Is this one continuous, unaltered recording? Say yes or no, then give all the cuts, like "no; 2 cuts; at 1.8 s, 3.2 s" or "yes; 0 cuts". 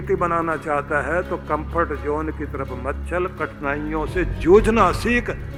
yes; 0 cuts